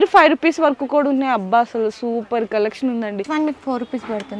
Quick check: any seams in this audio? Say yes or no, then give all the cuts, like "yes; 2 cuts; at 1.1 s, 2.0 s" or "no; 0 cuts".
yes; 1 cut; at 3.3 s